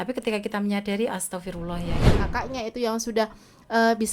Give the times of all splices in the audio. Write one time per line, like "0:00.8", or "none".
0:02.1